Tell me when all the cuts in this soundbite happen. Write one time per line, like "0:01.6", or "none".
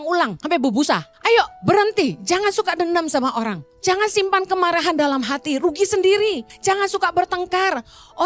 0:01.1
0:03.6
0:06.5